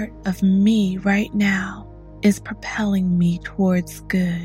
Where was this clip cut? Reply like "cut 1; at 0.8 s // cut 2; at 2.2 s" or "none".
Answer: none